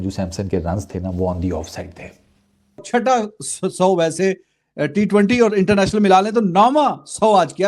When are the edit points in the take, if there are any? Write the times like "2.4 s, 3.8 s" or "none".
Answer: 2.8 s